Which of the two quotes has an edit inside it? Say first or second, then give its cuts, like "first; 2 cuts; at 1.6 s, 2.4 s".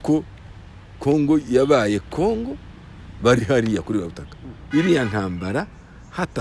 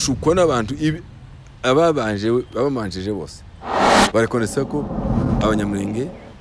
first; 1 cut; at 4.5 s